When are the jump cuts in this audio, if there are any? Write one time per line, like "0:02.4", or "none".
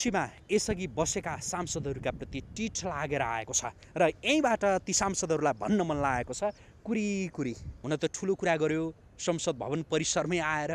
0:07.7